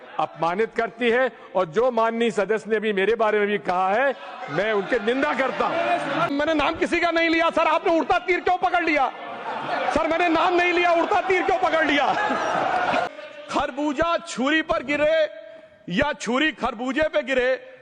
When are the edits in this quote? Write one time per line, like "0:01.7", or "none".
0:06.3
0:13.1